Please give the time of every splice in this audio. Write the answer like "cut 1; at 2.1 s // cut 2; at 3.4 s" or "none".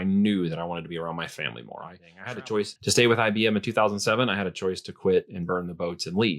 cut 1; at 2.3 s